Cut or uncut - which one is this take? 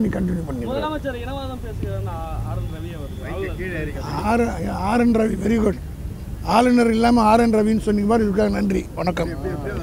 uncut